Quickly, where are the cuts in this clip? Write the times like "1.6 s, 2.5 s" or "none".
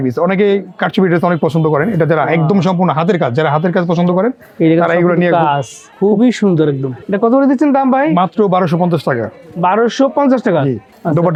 none